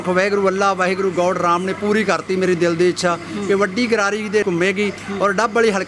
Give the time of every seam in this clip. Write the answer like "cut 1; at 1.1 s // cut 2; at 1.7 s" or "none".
cut 1; at 4.4 s